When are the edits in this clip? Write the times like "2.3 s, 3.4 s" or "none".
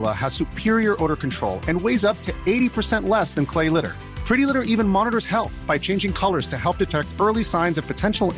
none